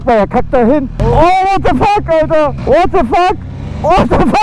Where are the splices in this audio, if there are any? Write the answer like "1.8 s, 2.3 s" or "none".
0.9 s, 2.6 s